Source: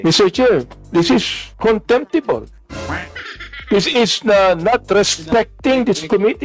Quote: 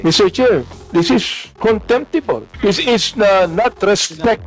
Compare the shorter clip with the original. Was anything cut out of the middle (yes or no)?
yes